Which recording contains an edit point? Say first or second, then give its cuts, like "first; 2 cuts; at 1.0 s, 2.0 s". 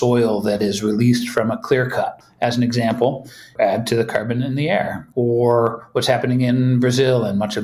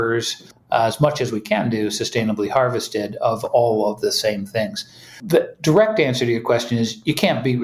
first; 1 cut; at 5.0 s